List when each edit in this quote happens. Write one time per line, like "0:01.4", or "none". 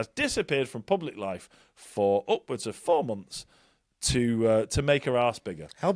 none